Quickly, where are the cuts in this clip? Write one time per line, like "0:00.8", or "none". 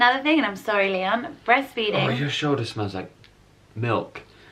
none